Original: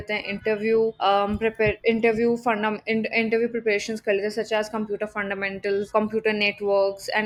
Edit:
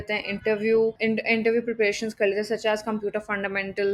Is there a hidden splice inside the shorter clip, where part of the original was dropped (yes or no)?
yes